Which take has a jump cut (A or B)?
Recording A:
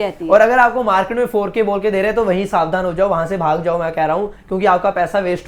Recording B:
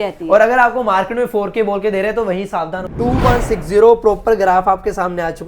B